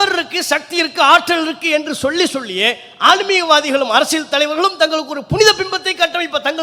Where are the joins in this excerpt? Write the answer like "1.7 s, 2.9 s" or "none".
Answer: none